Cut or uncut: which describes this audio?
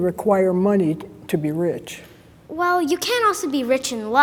uncut